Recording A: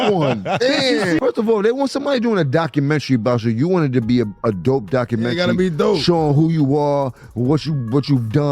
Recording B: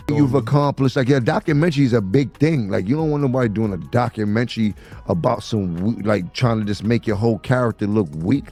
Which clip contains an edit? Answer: A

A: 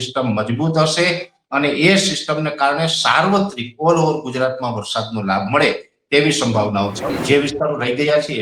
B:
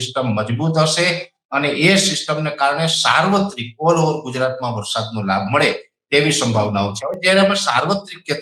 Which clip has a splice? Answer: A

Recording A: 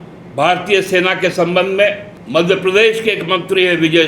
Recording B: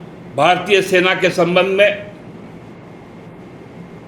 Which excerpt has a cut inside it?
A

